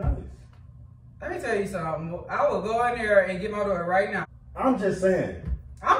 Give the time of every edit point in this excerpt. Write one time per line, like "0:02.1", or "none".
0:04.2

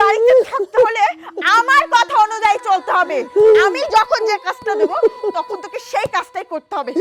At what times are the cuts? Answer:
none

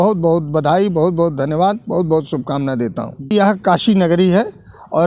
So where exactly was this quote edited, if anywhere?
0:03.3

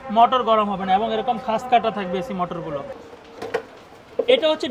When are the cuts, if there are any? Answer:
0:02.9

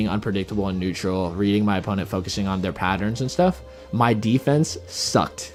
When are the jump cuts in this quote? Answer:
none

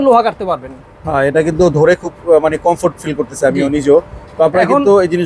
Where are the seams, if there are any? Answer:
none

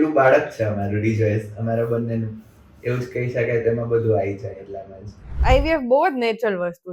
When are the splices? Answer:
0:05.4

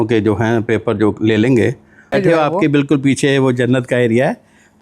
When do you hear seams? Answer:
0:02.1

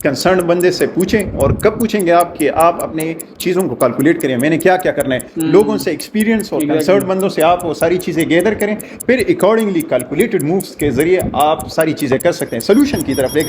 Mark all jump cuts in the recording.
none

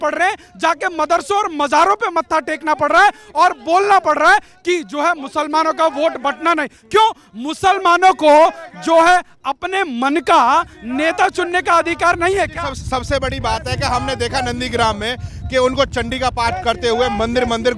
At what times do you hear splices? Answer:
none

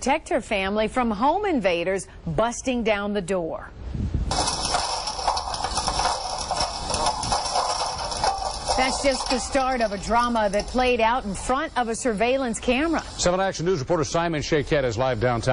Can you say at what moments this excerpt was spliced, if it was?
none

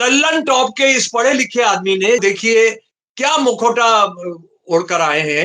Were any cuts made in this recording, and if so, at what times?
0:02.2

